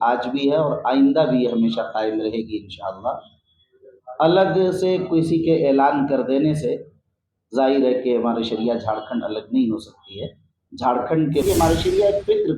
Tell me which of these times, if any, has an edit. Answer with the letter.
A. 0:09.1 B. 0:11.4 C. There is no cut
B